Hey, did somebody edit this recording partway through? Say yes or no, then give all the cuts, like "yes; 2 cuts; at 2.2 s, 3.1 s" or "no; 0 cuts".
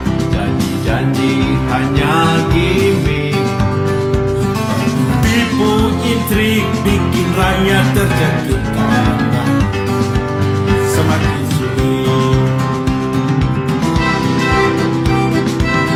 no; 0 cuts